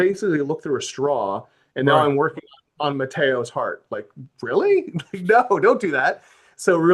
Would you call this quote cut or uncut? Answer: uncut